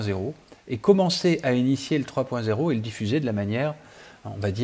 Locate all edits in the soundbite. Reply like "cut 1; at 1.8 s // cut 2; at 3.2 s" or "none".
none